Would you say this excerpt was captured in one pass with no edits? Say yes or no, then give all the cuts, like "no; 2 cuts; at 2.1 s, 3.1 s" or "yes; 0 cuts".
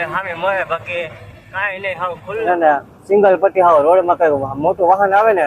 no; 1 cut; at 2.4 s